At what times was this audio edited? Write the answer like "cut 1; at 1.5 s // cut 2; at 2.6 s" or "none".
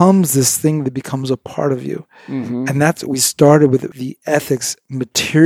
cut 1; at 3.9 s

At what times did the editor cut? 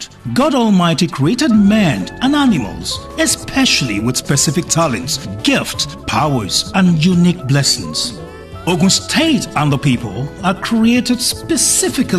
none

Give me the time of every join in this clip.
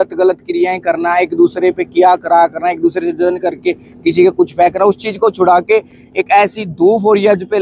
none

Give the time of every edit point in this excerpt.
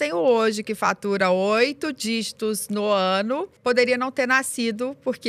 cut 1; at 3.5 s

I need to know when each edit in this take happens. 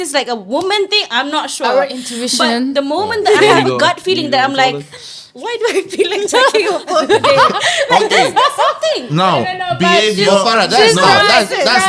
none

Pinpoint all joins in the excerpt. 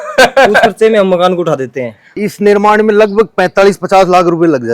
cut 1; at 2.0 s

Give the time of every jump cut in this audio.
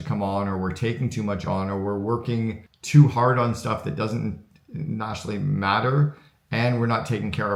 none

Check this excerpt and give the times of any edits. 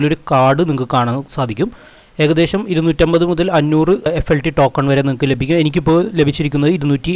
cut 1; at 4.1 s

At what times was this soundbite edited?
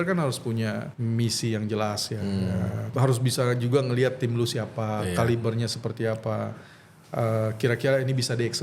cut 1; at 0.9 s // cut 2; at 2.9 s

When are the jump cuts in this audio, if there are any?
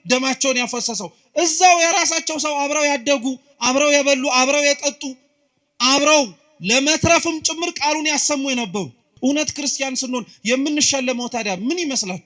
cut 1; at 9.1 s

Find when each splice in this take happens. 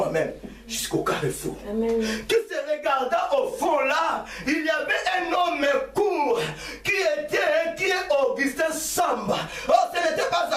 none

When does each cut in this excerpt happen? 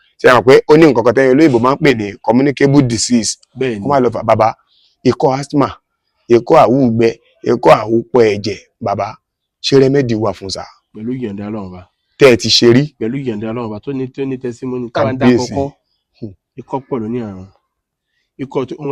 none

